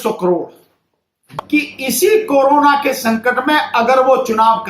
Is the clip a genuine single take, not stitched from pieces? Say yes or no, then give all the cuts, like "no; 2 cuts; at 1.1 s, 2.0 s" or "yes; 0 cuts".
no; 1 cut; at 1.3 s